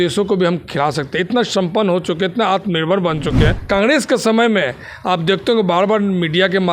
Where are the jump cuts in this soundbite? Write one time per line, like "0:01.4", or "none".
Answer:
0:03.6